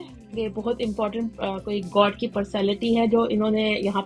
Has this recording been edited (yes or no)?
no